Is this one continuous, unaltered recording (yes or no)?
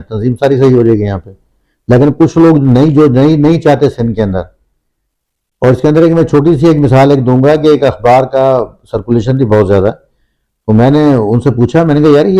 yes